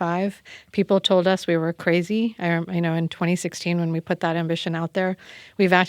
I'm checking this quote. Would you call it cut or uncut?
uncut